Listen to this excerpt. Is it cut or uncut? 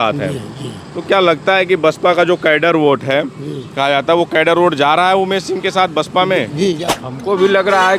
cut